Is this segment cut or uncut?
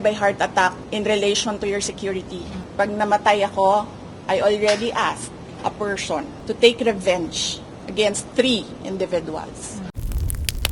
cut